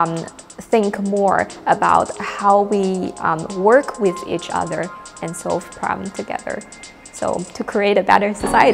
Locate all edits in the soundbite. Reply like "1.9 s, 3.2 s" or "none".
none